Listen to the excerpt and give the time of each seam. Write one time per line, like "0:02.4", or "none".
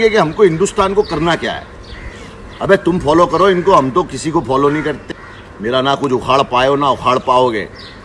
0:05.0